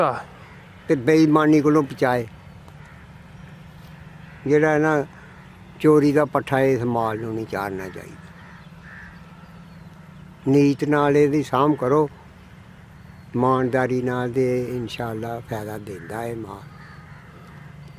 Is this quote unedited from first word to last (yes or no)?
yes